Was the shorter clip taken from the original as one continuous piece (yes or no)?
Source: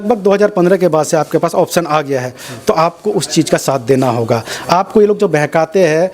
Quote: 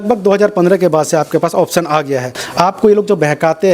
no